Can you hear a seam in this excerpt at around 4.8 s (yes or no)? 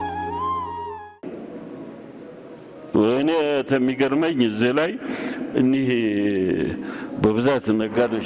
no